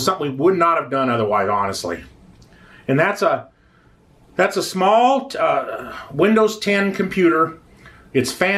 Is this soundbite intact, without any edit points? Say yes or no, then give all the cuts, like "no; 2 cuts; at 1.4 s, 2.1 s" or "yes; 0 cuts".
yes; 0 cuts